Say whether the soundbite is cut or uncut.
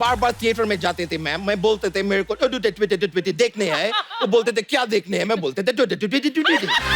uncut